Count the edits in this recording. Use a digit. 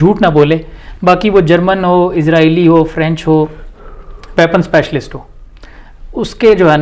0